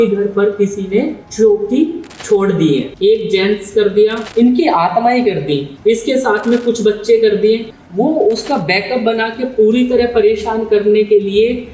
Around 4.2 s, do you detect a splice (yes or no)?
yes